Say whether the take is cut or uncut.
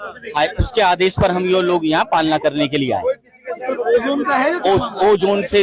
uncut